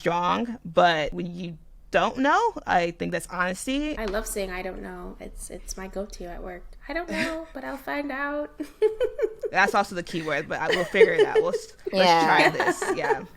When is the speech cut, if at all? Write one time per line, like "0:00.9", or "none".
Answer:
0:01.2
0:04.0